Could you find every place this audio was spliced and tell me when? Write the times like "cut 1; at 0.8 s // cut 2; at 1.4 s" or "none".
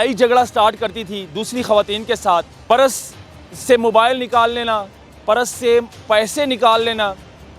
cut 1; at 2.5 s